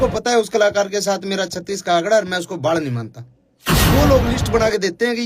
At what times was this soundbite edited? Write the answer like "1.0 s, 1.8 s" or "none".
3.8 s